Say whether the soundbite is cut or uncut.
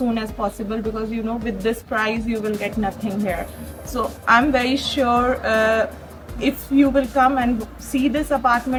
uncut